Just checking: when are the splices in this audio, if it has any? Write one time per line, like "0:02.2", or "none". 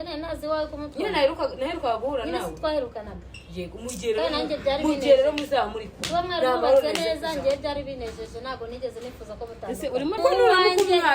0:10.2